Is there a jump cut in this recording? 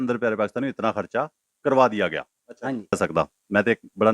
yes; 1 cut; at 3.0 s

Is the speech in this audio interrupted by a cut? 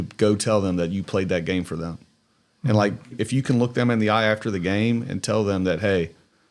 yes; 1 cut; at 3.1 s

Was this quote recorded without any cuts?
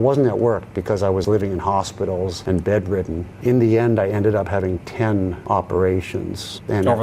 no; 2 cuts; at 1.2 s, 5.4 s

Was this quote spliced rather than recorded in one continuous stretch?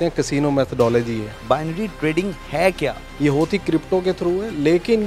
yes; 2 cuts; at 1.3 s, 3.0 s

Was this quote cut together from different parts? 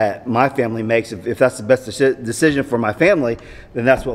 no; 0 cuts

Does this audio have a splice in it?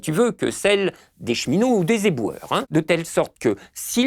yes; 1 cut; at 2.7 s

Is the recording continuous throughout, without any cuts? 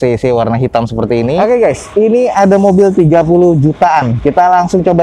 no; 1 cut; at 1.4 s

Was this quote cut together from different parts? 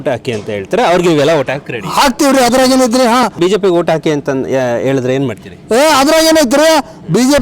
yes; 1 cut; at 3.4 s

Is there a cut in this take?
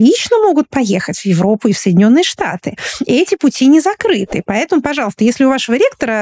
no; 0 cuts

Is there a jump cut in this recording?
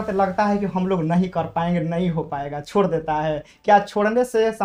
no; 0 cuts

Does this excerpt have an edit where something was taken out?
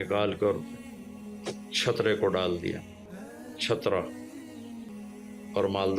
yes; 1 cut; at 4.9 s

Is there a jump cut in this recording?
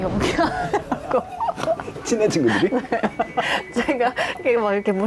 no; 0 cuts

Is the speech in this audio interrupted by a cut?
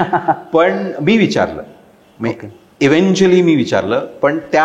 no; 0 cuts

